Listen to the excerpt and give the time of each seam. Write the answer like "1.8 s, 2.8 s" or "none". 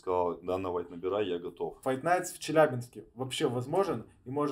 1.8 s